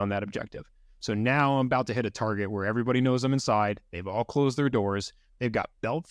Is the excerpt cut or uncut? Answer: uncut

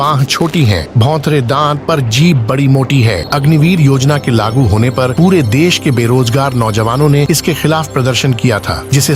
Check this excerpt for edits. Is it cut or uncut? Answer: cut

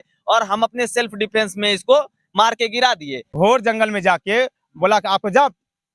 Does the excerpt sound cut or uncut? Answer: cut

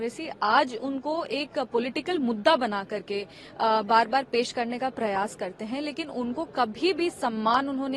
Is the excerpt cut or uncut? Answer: uncut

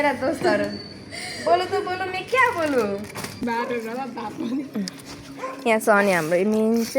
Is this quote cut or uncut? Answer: cut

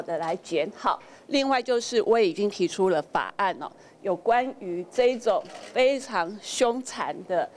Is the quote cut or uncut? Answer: uncut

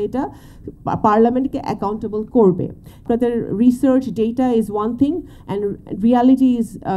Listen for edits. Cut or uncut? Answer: cut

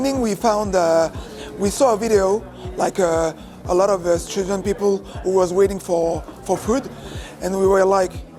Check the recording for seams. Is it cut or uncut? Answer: uncut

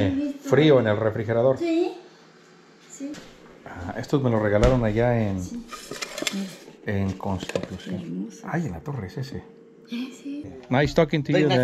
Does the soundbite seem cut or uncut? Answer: cut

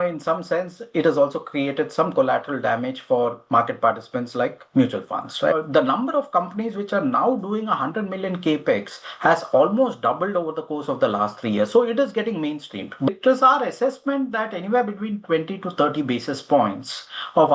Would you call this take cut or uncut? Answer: cut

